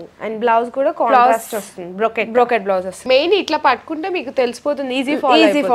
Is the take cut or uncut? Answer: cut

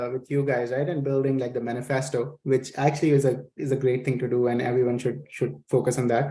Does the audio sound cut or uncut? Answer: uncut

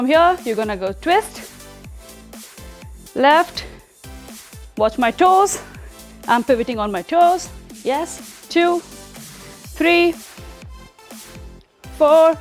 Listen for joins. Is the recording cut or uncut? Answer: cut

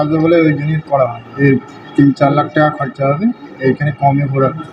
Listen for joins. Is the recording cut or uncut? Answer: cut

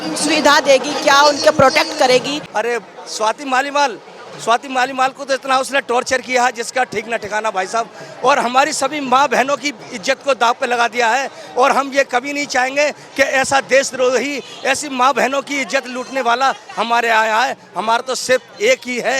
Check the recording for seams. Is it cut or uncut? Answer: cut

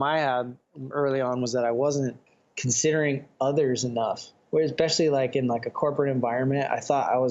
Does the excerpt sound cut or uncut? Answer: cut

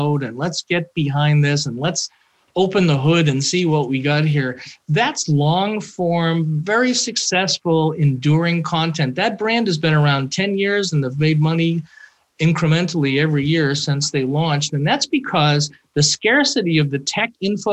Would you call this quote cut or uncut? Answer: uncut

